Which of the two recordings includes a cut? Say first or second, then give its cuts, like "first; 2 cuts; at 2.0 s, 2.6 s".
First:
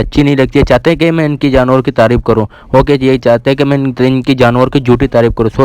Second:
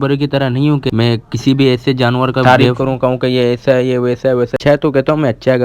second; 3 cuts; at 0.8 s, 2.3 s, 4.5 s